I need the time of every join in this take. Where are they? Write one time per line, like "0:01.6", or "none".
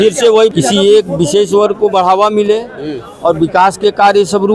none